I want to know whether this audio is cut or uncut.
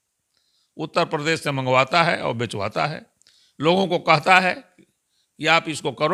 uncut